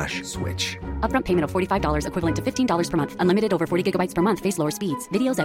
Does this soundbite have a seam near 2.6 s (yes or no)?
no